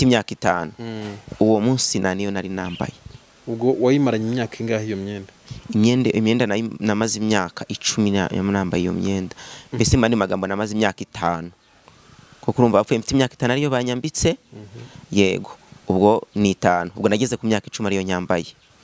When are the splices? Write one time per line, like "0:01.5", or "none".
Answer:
none